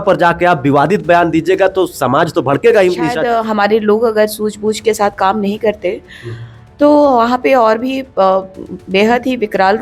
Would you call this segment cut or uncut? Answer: cut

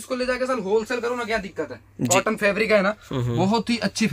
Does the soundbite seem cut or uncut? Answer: cut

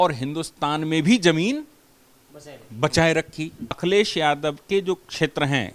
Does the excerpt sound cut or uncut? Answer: cut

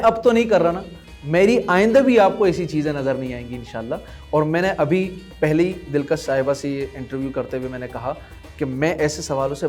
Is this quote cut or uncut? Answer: uncut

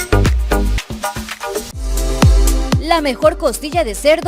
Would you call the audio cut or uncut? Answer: uncut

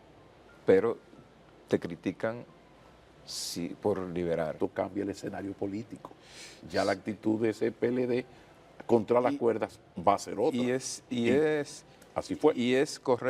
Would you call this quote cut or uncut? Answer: cut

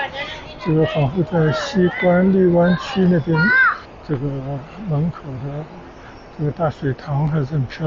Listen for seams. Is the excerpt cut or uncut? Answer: cut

